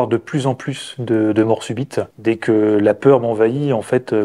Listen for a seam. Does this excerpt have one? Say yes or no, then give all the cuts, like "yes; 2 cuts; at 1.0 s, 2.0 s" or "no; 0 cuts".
yes; 1 cut; at 2.1 s